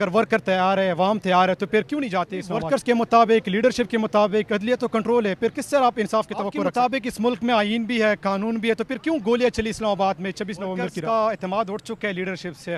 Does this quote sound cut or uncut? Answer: cut